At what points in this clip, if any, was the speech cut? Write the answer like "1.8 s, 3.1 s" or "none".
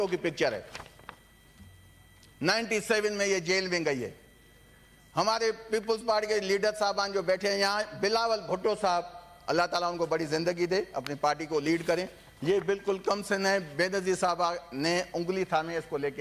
none